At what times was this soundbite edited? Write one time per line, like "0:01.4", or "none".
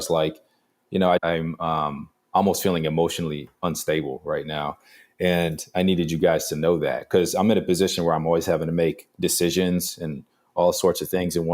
0:01.2